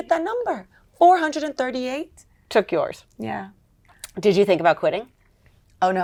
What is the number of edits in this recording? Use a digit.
0